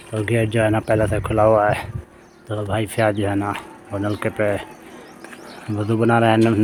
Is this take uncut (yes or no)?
yes